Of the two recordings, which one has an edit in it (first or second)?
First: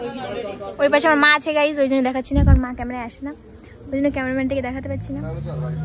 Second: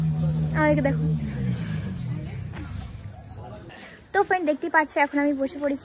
second